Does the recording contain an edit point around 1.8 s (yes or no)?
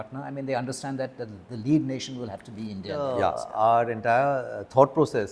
no